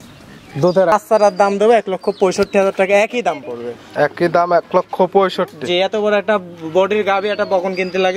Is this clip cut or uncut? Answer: cut